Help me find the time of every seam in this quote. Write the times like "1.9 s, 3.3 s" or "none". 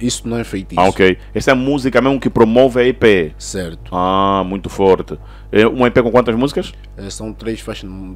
none